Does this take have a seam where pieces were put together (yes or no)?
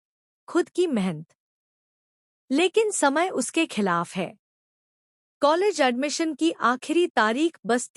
no